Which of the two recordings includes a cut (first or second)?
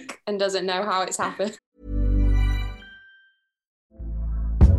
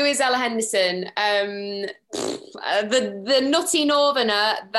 first